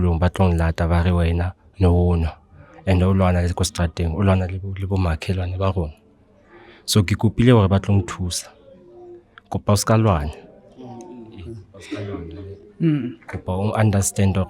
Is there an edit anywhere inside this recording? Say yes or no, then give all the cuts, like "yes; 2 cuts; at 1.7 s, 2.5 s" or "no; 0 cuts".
no; 0 cuts